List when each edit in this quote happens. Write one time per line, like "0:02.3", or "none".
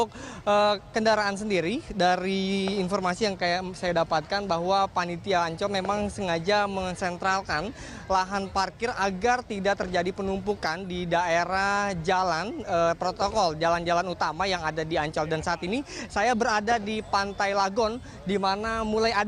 0:11.3

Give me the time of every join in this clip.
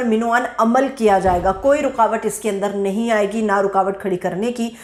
none

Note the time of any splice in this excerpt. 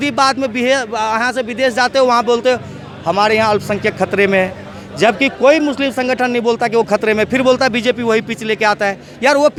none

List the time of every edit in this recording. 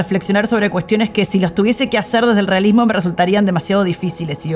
none

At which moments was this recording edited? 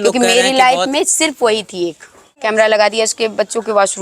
0:02.4

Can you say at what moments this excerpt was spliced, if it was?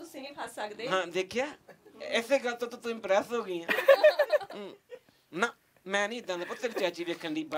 none

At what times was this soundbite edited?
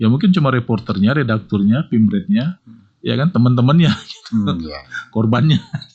none

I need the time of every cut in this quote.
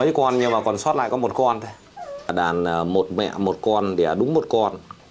0:02.3

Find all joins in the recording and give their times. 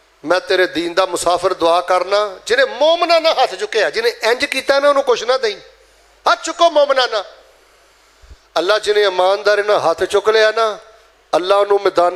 none

